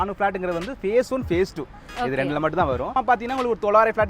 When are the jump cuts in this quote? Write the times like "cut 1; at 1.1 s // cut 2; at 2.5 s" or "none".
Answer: cut 1; at 2.9 s